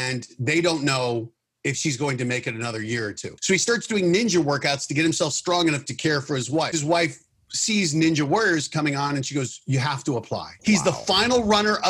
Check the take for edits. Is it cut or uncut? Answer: cut